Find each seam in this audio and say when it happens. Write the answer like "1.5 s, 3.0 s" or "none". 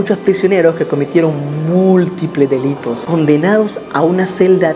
none